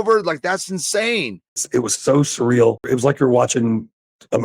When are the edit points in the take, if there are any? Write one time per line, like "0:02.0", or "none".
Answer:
0:01.6
0:02.9